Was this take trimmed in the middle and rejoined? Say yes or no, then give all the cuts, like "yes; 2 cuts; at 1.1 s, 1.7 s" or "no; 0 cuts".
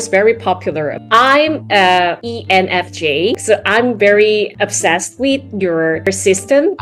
yes; 3 cuts; at 1.0 s, 2.3 s, 3.4 s